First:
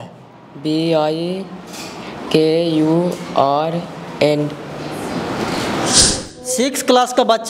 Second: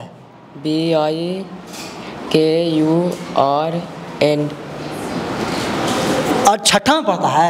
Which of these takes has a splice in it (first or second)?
first